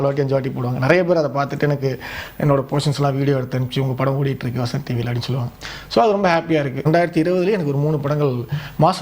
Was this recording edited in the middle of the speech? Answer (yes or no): yes